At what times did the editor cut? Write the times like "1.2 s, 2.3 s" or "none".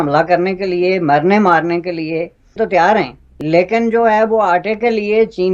2.5 s